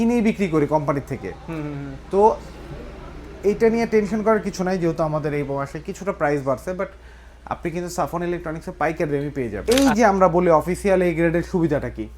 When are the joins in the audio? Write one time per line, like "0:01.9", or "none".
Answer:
0:09.6